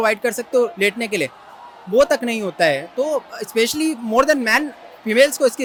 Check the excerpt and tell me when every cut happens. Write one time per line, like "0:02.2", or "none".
none